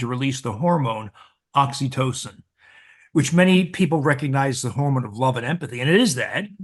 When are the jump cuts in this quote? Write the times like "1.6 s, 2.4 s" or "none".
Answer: none